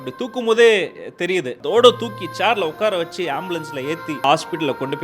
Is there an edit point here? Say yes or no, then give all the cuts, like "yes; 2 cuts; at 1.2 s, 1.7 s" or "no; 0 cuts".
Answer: yes; 2 cuts; at 1.6 s, 4.2 s